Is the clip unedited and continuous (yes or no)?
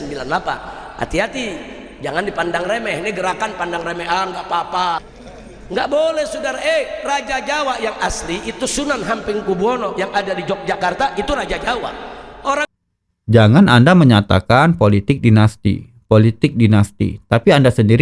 no